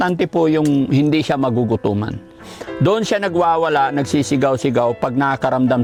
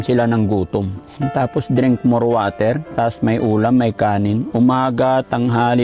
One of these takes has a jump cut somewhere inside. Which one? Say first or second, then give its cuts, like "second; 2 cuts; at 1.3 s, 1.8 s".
second; 1 cut; at 1.0 s